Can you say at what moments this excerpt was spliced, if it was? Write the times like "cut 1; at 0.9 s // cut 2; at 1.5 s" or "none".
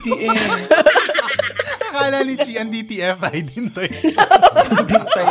none

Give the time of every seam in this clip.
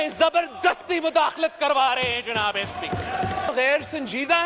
cut 1; at 3.5 s

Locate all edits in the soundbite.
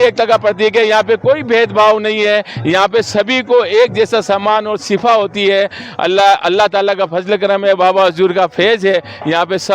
none

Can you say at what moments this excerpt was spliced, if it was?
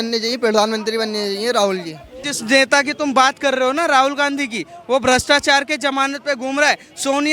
cut 1; at 2.2 s

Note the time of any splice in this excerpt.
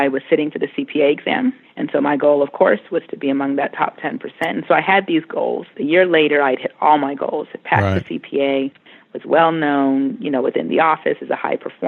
cut 1; at 1.7 s // cut 2; at 5.7 s

